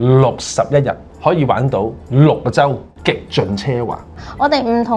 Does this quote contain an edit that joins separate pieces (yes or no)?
yes